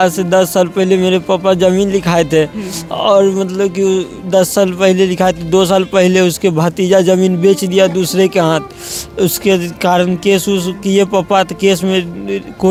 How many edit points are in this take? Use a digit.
0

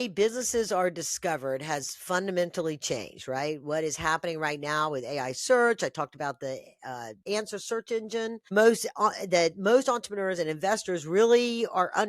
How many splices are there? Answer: 2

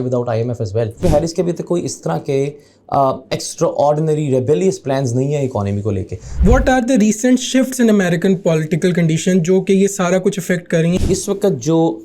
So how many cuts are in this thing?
3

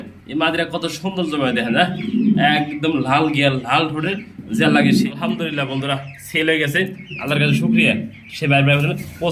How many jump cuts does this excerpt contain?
1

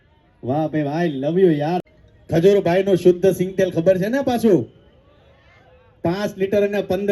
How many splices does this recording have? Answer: 1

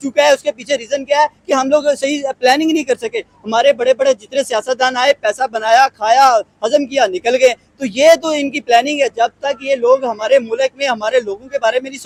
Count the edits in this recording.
0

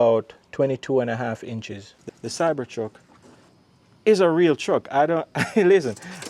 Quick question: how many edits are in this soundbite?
1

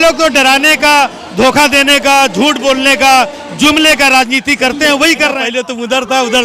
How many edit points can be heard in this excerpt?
1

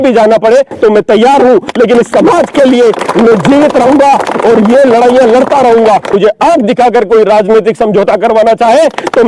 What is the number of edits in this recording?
1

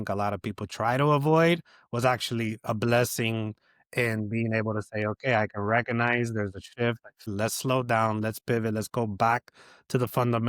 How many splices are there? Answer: 1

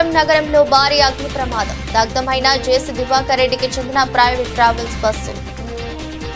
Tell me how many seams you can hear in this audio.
0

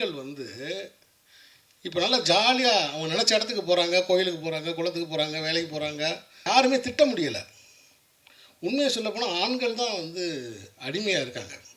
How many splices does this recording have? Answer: 1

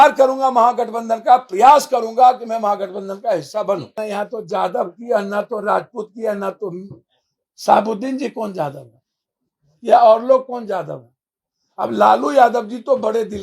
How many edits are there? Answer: 1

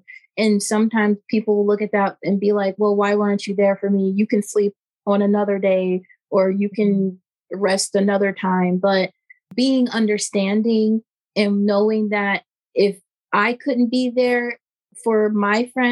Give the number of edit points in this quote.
0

